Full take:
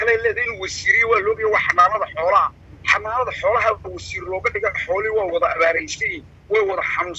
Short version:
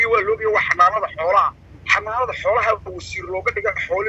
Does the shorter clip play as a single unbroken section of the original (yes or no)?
yes